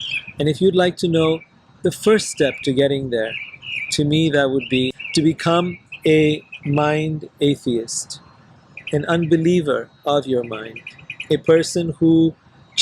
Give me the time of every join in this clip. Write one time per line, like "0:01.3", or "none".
0:05.0